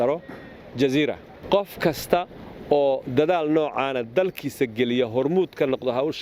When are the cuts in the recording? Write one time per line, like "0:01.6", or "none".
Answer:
0:01.4

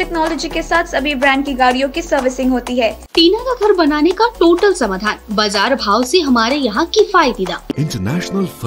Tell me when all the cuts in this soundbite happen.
0:03.0
0:07.7

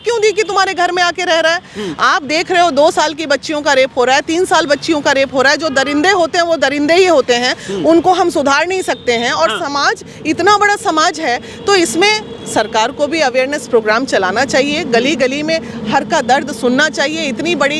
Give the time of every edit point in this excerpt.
none

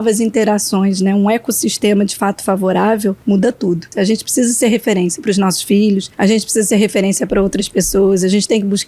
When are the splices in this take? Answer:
0:03.7
0:06.1

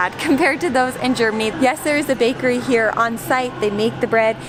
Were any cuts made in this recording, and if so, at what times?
none

